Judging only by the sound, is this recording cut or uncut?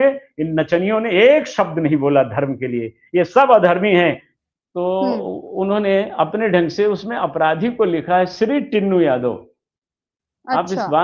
cut